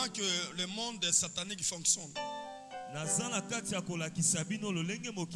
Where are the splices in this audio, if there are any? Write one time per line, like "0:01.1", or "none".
none